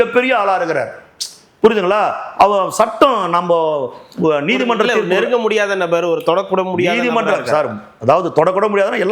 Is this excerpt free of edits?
yes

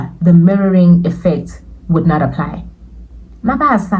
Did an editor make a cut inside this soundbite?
no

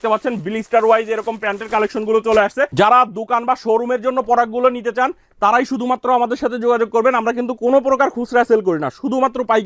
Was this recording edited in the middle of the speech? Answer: yes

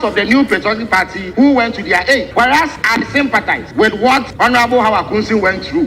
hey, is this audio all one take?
no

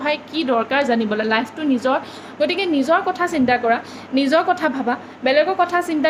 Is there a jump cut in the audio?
no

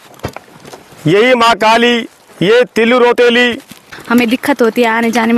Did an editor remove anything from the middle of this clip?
yes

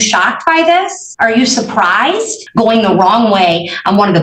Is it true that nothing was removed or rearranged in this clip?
no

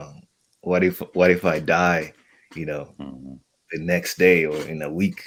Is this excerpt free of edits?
yes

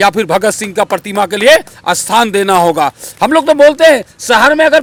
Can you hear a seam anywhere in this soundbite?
no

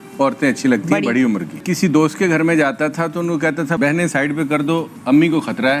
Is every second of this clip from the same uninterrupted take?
yes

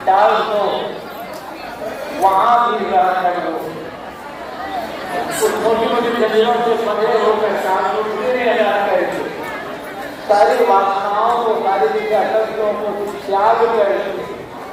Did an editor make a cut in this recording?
no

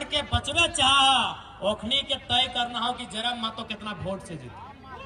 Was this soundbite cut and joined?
no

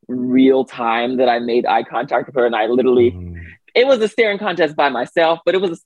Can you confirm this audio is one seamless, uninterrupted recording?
yes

